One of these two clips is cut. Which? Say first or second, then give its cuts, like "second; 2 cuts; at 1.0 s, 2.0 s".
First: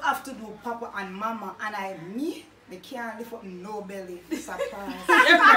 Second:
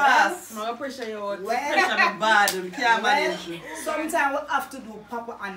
second; 1 cut; at 1.3 s